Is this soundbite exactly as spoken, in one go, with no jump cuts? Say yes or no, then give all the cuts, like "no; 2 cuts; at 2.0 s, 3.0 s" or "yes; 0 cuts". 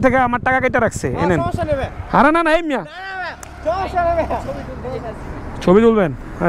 yes; 0 cuts